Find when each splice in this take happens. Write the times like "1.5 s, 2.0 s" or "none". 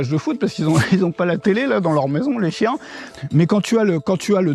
none